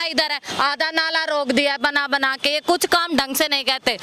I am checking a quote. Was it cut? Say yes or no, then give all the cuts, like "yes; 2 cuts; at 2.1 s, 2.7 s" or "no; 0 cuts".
no; 0 cuts